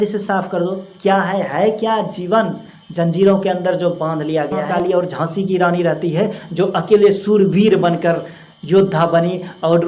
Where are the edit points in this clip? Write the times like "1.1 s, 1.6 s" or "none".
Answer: 4.6 s